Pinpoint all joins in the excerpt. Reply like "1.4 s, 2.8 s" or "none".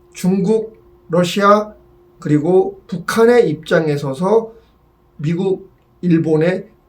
none